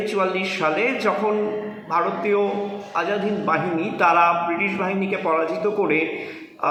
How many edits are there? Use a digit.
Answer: 0